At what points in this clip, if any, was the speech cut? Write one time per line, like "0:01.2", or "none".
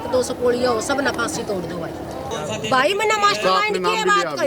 0:02.3

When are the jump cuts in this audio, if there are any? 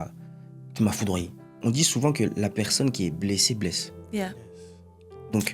0:01.5

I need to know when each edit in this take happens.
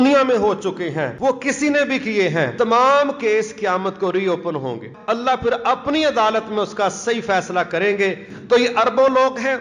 0:01.1
0:02.5
0:04.9
0:08.3

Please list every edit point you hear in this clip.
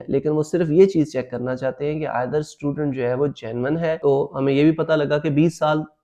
0:04.0

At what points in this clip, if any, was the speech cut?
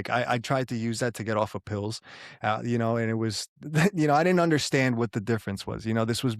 none

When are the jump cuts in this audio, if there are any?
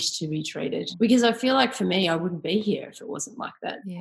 0:00.9

